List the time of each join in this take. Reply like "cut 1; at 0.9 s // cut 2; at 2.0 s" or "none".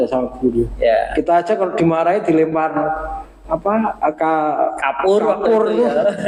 none